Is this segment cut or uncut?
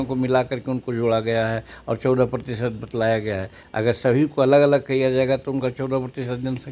uncut